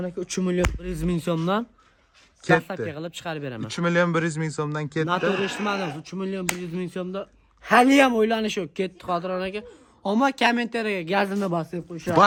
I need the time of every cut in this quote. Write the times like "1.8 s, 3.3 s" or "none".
none